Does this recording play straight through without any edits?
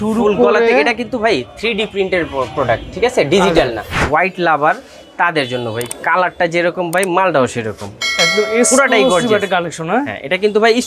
no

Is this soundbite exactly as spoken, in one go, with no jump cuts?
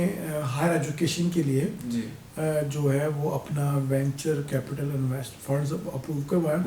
yes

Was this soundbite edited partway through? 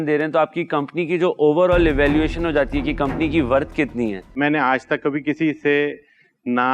yes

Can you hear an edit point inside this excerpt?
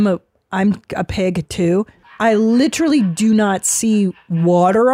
yes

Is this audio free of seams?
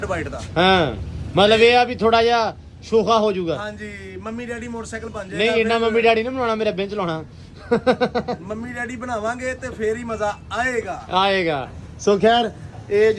yes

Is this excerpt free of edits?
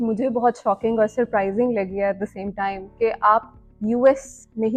yes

